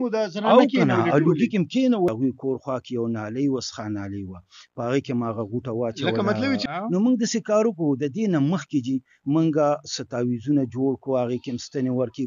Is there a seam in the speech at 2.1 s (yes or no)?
yes